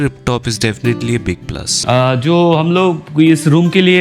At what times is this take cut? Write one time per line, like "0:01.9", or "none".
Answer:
0:01.7